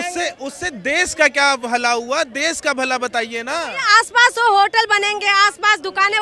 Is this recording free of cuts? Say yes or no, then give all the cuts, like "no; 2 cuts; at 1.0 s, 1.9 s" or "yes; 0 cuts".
yes; 0 cuts